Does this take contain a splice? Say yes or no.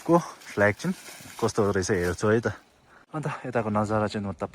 yes